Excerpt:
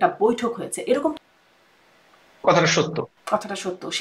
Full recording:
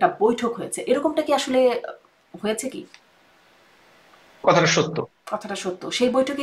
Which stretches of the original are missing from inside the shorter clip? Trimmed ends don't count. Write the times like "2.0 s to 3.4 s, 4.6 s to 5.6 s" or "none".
1.1 s to 3.1 s